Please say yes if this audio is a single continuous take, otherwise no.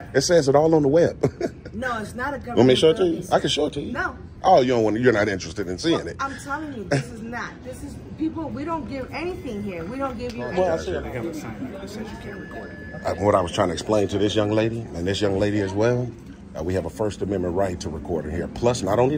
no